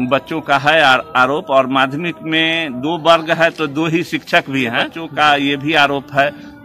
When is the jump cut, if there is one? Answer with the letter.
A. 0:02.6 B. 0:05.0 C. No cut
B